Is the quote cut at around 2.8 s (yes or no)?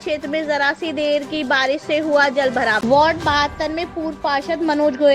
yes